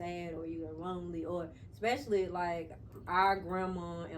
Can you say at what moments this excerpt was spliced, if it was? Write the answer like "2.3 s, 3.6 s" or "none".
none